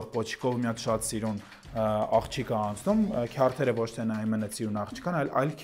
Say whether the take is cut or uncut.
uncut